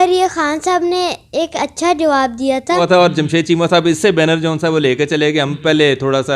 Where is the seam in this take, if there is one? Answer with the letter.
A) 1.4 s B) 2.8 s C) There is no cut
B